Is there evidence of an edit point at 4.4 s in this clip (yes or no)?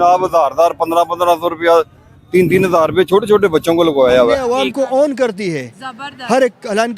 yes